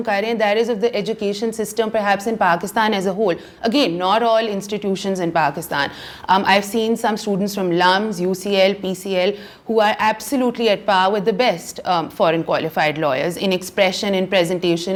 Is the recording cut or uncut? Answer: uncut